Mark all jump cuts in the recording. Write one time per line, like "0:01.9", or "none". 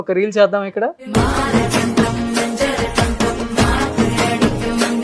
0:01.0